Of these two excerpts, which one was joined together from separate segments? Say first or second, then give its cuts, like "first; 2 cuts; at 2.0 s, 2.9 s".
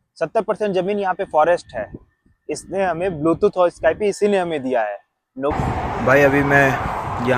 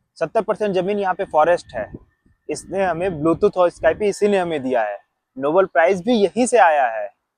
first; 1 cut; at 5.5 s